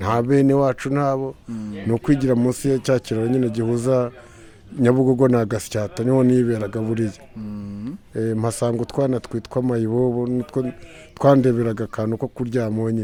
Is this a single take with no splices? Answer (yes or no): yes